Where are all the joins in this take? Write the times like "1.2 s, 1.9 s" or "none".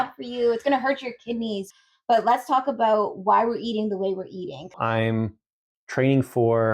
1.7 s, 4.6 s